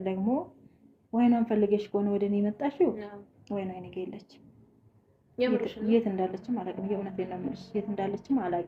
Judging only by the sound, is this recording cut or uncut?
uncut